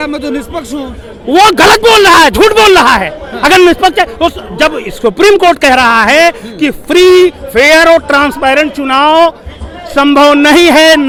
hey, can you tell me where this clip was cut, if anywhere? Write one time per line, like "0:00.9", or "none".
none